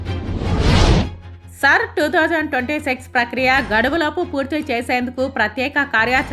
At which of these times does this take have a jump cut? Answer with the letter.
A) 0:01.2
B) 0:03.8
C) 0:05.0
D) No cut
A